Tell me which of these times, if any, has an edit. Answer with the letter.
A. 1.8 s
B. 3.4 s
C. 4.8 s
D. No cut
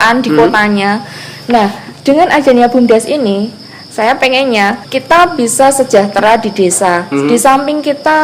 C